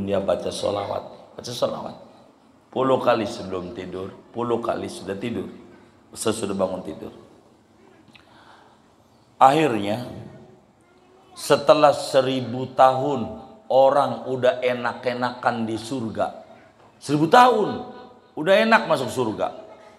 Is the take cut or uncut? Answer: uncut